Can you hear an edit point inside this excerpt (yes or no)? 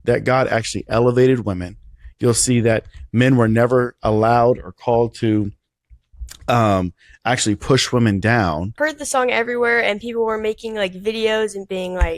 yes